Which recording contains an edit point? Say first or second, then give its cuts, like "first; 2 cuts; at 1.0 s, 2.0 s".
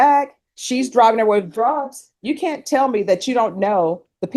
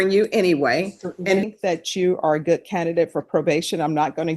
second; 1 cut; at 1.4 s